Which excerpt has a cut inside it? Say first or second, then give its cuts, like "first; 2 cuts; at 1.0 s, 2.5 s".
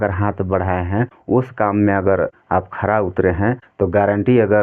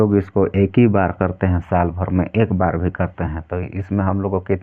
first; 3 cuts; at 1.2 s, 2.4 s, 3.7 s